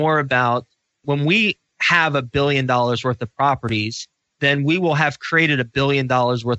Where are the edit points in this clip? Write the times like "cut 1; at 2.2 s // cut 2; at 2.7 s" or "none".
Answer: cut 1; at 1.0 s